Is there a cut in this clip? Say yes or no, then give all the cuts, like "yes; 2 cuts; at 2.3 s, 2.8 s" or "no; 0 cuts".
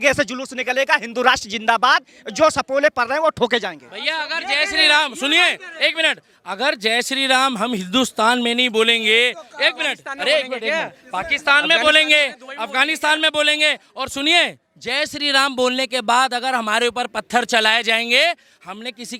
no; 0 cuts